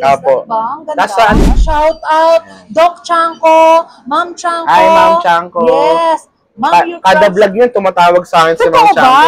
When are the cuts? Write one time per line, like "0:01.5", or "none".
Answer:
0:01.5